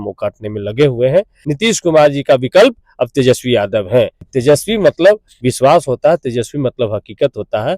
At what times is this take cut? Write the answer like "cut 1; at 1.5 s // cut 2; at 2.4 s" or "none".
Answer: cut 1; at 1.4 s // cut 2; at 4.2 s